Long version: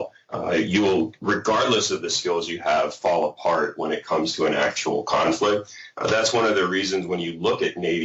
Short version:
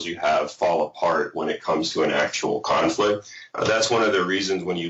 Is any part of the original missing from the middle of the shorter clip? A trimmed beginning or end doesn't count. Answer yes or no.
no